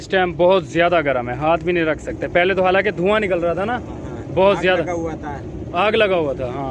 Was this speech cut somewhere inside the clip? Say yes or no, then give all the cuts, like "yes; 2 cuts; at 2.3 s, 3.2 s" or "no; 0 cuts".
no; 0 cuts